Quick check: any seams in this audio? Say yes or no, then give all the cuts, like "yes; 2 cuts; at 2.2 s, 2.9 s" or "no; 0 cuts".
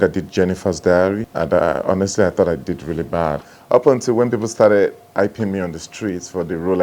yes; 2 cuts; at 1.3 s, 3.5 s